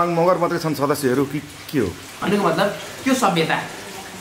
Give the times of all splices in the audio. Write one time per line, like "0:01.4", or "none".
0:02.1